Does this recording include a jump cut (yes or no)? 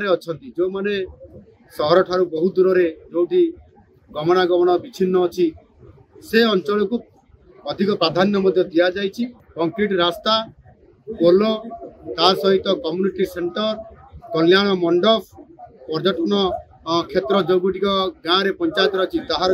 yes